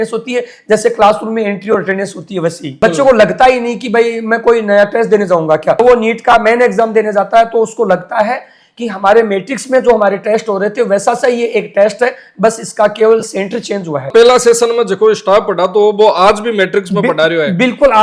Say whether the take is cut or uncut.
cut